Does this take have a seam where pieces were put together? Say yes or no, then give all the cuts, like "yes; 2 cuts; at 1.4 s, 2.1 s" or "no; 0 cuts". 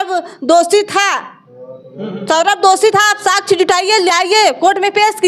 no; 0 cuts